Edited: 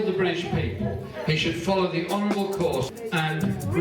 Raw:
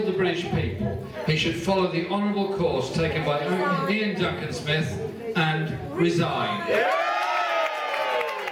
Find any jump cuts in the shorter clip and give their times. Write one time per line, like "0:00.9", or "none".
0:02.9